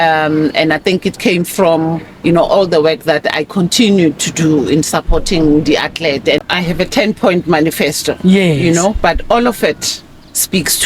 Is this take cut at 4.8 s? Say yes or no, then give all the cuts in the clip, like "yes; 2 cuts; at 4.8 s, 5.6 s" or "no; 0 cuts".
no; 1 cut; at 6.4 s